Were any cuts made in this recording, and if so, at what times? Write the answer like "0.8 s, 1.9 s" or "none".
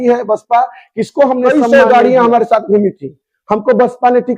1.4 s